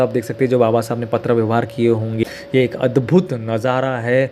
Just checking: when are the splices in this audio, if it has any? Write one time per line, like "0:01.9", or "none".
0:02.2